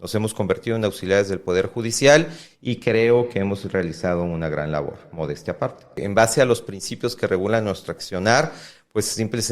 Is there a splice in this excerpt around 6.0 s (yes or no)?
yes